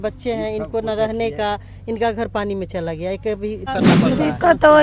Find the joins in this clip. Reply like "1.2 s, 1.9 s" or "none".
3.7 s